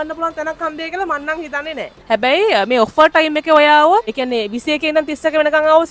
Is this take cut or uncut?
cut